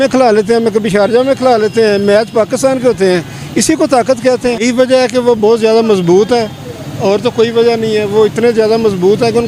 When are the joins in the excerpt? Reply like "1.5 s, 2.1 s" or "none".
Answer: 4.6 s